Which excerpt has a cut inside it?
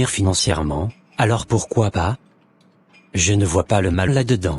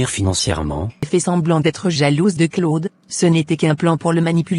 second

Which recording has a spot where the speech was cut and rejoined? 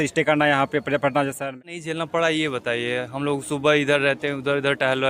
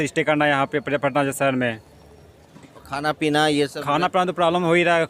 first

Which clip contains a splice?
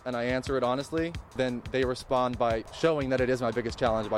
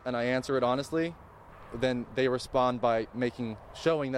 first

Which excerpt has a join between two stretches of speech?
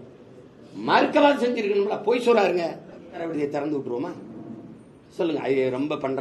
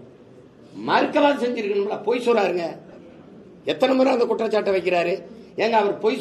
first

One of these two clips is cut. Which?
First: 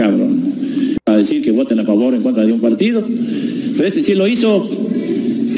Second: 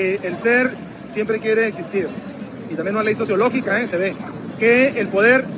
first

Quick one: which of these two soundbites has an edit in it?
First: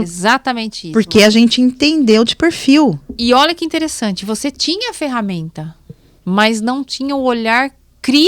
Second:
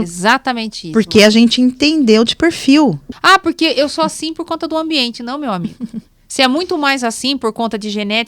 second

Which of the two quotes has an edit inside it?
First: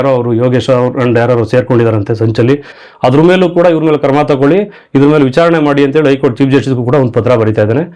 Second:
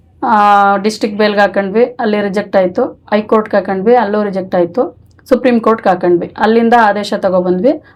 first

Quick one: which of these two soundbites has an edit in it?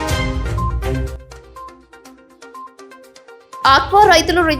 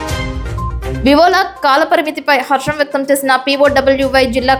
first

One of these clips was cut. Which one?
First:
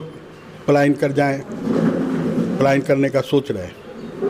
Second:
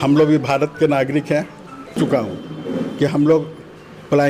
second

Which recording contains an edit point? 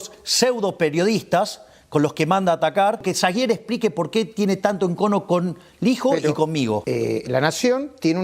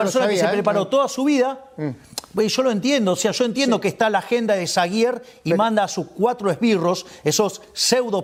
first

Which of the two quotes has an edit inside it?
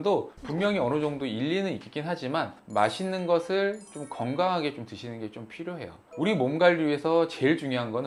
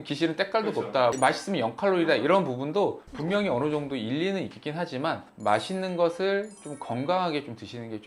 second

